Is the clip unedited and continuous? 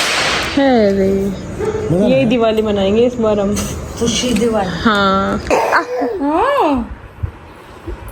no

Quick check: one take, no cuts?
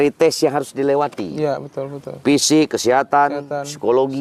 yes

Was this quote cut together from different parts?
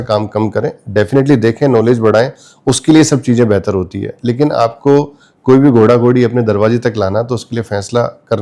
no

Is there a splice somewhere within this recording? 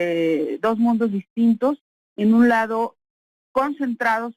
yes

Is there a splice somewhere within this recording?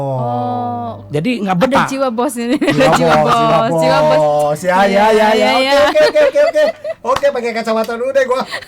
no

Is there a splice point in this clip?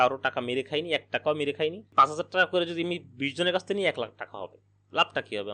yes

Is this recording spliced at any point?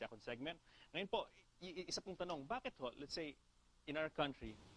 yes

